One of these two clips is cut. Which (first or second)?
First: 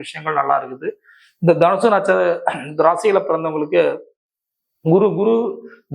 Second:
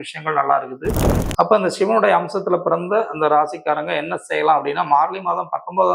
second